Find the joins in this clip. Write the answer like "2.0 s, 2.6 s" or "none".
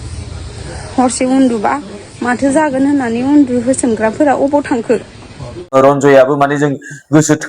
5.5 s